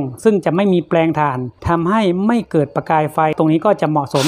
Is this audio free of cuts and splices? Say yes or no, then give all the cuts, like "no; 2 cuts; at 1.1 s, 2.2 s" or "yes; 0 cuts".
no; 2 cuts; at 1.5 s, 3.3 s